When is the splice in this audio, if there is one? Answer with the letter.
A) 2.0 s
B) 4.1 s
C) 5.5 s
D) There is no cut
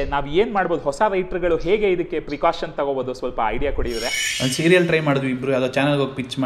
B